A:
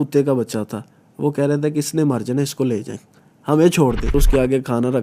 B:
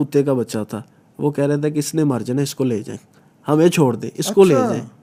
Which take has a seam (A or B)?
A